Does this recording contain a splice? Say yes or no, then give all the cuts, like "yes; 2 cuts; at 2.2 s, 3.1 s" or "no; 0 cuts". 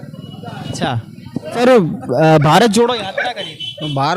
yes; 1 cut; at 1.6 s